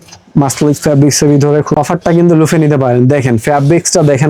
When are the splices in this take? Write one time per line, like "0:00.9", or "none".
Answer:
0:01.7